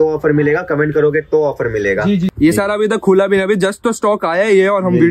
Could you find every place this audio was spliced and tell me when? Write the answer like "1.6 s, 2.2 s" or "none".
2.3 s